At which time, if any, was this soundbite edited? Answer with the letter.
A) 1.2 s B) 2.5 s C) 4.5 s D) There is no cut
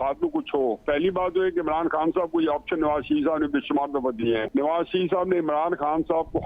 C